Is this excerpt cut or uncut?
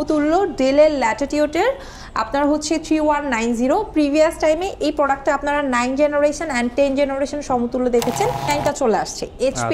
cut